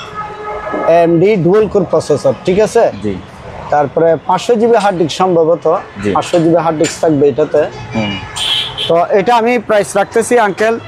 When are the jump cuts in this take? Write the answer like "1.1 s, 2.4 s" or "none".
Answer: none